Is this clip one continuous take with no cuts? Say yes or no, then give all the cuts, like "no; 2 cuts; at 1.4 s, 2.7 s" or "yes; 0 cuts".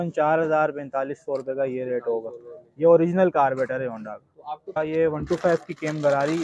no; 1 cut; at 4.8 s